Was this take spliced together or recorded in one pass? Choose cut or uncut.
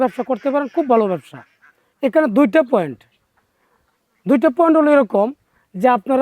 uncut